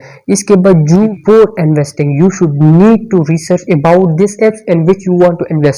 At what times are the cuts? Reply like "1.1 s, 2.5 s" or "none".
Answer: 1.0 s